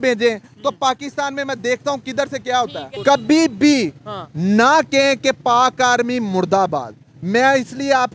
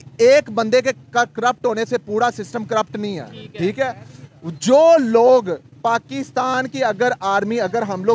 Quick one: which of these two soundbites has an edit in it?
first; 1 cut; at 2.8 s

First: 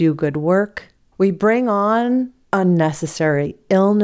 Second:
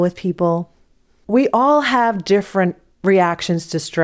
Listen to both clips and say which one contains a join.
second; 1 cut; at 1.1 s

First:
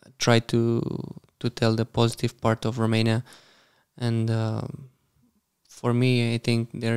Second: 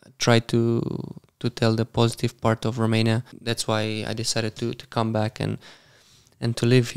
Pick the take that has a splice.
second; 1 cut; at 3.3 s

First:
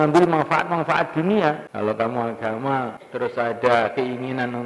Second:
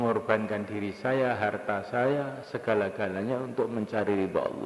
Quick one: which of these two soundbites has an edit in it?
first; 2 cuts; at 1.7 s, 3.0 s

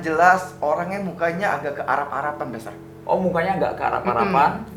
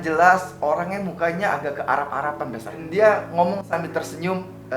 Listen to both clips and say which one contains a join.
second; 1 cut; at 2.8 s

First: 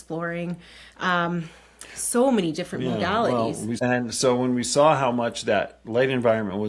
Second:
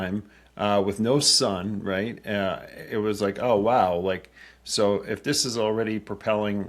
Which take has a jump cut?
first; 1 cut; at 3.8 s

